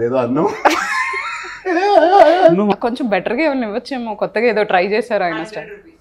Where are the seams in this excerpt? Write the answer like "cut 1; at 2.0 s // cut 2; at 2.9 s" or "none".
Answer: cut 1; at 2.7 s